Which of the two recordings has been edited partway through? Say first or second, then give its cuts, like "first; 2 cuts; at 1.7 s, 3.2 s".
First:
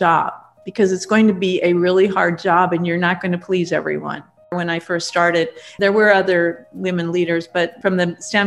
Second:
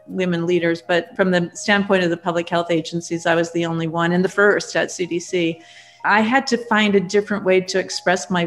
first; 2 cuts; at 4.5 s, 5.6 s